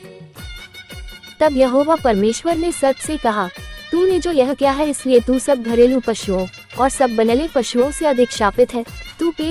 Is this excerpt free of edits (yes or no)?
no